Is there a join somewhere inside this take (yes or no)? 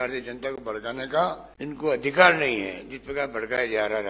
yes